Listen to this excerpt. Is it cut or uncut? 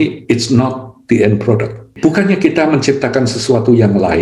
cut